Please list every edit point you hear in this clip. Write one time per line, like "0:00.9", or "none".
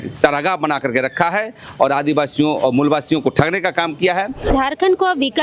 0:04.5